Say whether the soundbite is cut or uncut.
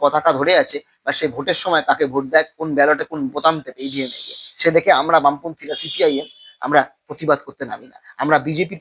uncut